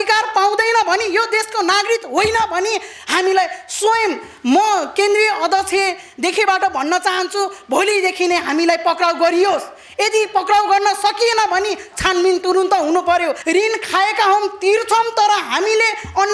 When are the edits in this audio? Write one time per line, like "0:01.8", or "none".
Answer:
0:13.4